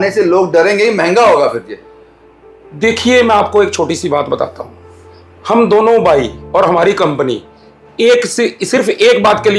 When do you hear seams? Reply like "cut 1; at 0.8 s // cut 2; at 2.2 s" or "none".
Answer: none